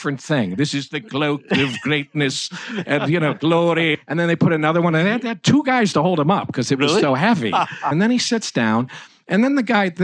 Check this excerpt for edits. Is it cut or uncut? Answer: cut